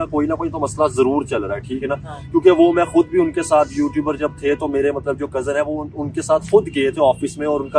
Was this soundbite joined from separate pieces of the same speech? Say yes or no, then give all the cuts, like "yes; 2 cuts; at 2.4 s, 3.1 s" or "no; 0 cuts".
no; 0 cuts